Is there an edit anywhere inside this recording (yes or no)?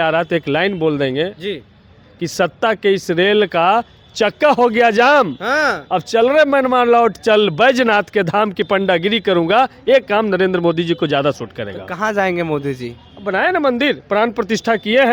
no